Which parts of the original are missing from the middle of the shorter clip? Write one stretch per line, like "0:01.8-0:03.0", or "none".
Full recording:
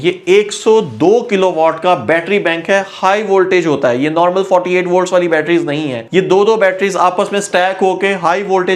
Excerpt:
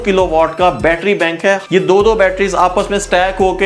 0:02.9-0:06.1